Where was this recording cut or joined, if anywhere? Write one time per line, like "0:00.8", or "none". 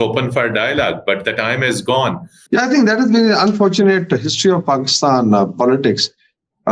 0:02.3